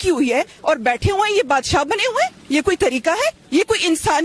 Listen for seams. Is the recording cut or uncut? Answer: uncut